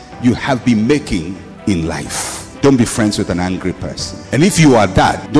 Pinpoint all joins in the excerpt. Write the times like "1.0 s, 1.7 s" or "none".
2.4 s